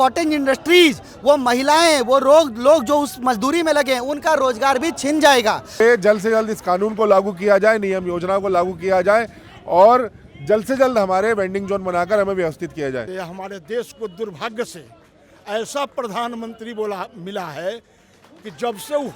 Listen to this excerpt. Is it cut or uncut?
cut